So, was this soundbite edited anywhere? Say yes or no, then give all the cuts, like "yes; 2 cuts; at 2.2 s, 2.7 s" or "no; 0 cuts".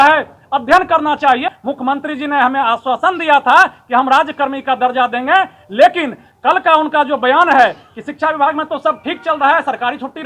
yes; 1 cut; at 1.6 s